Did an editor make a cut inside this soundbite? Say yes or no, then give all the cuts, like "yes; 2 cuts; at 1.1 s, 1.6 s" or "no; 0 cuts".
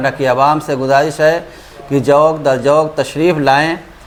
no; 0 cuts